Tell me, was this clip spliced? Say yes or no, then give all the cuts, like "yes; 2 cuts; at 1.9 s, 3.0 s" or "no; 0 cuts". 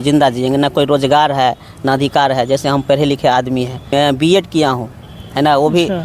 yes; 1 cut; at 3.9 s